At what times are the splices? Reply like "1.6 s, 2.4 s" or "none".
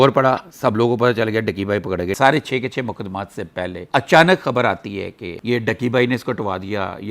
2.2 s, 5.4 s